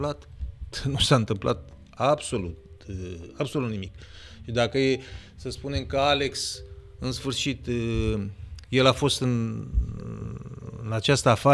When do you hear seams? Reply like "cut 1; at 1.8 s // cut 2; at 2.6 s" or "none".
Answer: none